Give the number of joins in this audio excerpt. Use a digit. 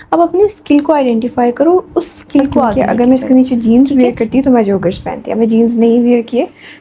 1